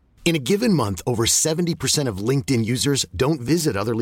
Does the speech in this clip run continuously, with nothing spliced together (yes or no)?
yes